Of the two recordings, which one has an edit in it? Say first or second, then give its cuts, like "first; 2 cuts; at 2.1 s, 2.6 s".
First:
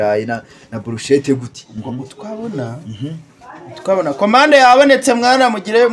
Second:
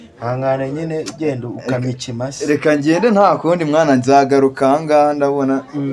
first; 1 cut; at 1.7 s